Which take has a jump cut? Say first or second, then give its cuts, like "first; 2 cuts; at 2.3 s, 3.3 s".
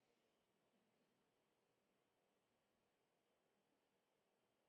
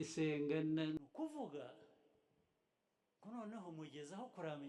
second; 1 cut; at 1.0 s